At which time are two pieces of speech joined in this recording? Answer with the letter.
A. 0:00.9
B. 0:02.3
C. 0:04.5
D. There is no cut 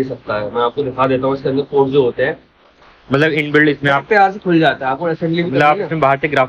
D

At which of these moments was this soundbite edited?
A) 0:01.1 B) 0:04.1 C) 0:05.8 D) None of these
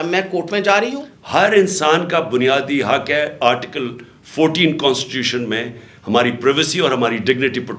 A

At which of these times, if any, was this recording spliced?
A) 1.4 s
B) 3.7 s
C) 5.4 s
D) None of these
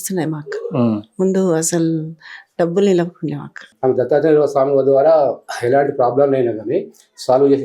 B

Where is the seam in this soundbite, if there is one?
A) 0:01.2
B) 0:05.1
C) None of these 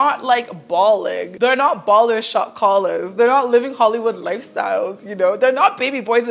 A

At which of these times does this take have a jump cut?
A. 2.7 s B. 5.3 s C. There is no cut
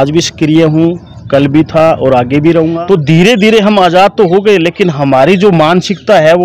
A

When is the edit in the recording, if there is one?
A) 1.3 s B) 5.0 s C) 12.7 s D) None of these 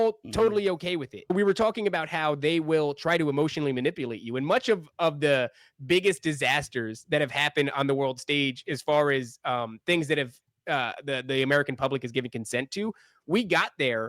A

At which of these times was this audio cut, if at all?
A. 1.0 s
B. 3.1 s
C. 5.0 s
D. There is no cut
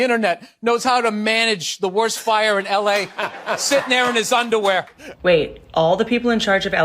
C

